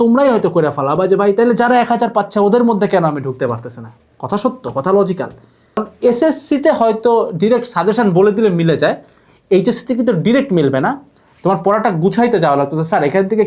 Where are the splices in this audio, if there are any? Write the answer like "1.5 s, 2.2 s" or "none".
5.8 s